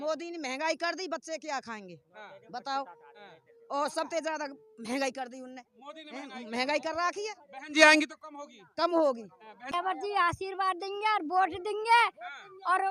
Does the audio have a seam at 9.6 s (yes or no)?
yes